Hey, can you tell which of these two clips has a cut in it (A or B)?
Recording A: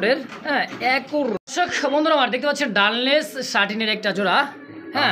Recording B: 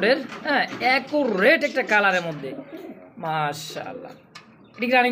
A